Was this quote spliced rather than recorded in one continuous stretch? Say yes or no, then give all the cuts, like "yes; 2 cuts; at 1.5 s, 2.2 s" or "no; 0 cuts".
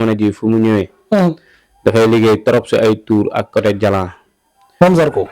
no; 0 cuts